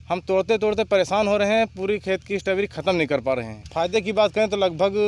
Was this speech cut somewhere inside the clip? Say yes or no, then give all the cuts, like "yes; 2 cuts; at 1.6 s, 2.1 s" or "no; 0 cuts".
yes; 1 cut; at 3.6 s